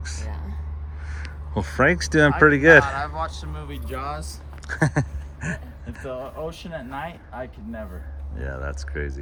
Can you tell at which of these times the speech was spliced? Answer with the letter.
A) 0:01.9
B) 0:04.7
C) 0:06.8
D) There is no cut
D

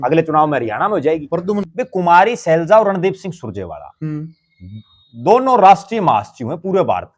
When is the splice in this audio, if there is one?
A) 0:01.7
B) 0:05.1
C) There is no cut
A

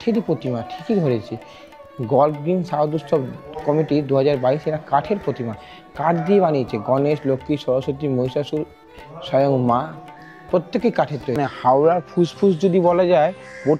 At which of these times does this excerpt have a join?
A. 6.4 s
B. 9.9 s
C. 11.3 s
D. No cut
C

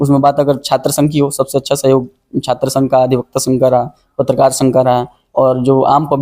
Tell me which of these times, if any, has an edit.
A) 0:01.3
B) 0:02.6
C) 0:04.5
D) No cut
D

